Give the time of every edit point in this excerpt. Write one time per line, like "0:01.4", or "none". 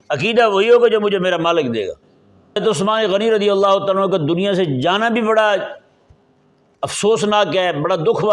0:02.6